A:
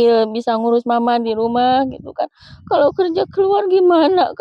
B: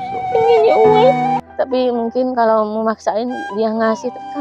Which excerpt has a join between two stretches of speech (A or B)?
B